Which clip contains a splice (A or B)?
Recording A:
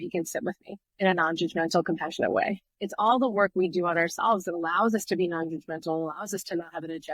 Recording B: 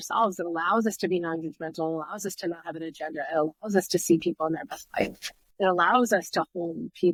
A